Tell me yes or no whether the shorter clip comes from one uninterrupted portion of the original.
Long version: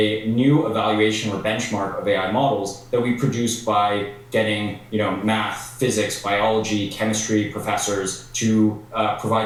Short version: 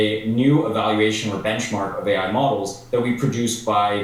yes